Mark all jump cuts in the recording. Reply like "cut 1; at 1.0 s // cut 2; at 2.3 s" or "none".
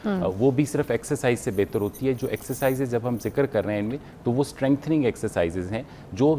none

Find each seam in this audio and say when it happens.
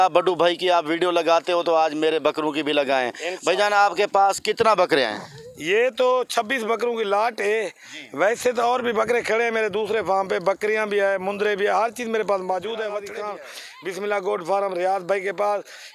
cut 1; at 13.1 s

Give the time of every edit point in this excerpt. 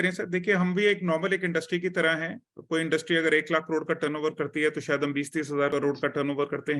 cut 1; at 5.7 s

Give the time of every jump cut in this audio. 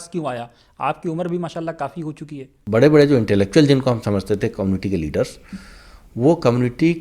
cut 1; at 2.5 s

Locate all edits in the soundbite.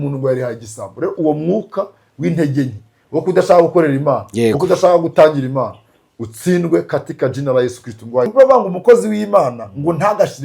cut 1; at 8.3 s

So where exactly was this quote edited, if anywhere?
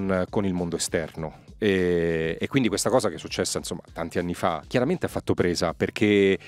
cut 1; at 4.6 s

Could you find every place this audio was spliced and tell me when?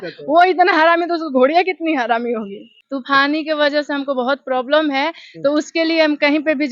cut 1; at 2.7 s

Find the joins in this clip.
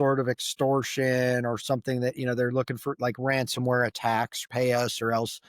cut 1; at 4.4 s

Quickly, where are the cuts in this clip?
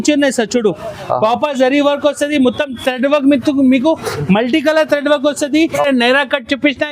cut 1; at 5.6 s

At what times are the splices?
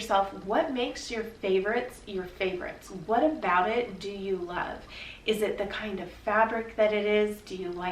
cut 1; at 3.0 s

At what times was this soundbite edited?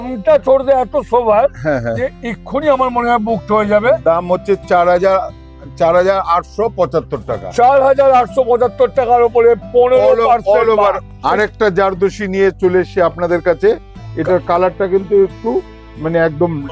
cut 1; at 11.0 s

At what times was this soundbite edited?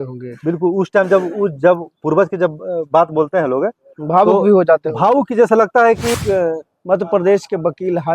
cut 1; at 6.1 s

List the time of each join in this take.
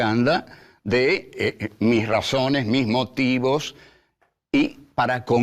cut 1; at 3.9 s

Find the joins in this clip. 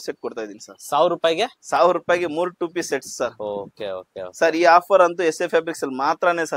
none

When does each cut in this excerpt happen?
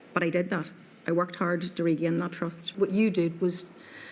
cut 1; at 2.7 s

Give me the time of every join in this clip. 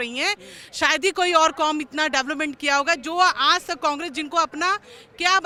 none

